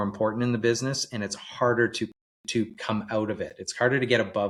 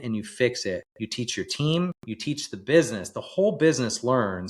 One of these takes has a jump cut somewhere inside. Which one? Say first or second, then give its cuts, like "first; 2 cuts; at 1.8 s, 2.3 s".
second; 2 cuts; at 1.0 s, 2.1 s